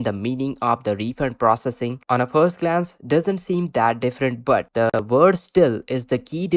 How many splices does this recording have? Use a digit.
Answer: 1